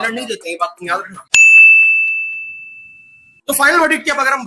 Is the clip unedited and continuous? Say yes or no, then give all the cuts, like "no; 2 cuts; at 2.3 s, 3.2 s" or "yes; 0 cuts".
yes; 0 cuts